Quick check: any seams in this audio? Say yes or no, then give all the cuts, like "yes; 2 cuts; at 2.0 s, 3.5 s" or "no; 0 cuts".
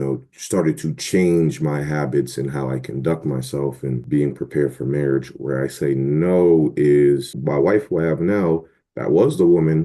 yes; 2 cuts; at 4.1 s, 7.3 s